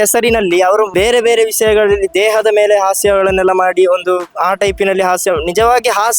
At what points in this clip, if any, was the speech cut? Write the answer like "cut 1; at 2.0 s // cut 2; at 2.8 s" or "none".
cut 1; at 0.9 s